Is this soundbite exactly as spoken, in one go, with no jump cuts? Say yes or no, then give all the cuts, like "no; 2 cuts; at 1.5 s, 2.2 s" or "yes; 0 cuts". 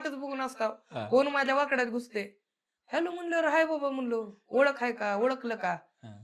yes; 0 cuts